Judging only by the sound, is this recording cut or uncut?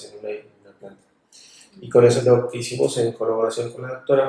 cut